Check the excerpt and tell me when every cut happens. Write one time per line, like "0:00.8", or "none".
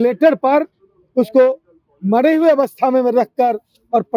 none